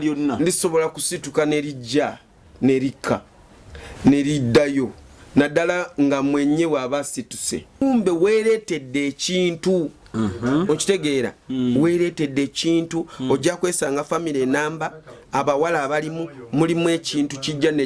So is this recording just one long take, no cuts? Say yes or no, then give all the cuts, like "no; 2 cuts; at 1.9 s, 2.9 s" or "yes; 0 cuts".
no; 1 cut; at 7.8 s